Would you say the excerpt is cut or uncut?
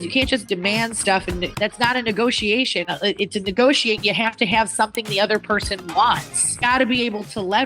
cut